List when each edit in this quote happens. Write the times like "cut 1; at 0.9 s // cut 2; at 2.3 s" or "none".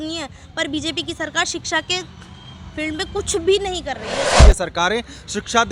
cut 1; at 4.4 s